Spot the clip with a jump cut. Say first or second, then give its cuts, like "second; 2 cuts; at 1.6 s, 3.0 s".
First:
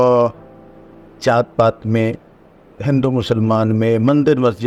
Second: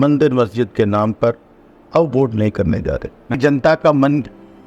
second; 1 cut; at 3.4 s